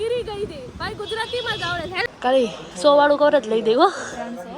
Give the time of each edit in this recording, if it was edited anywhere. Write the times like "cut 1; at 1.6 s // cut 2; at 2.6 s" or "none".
cut 1; at 2.1 s